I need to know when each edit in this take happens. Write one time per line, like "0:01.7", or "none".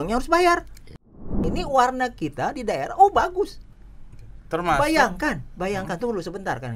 0:01.3